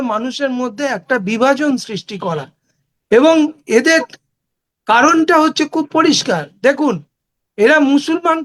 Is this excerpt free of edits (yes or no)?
yes